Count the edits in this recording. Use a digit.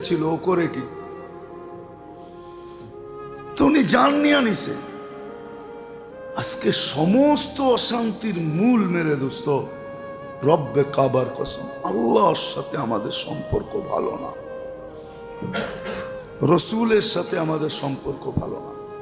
2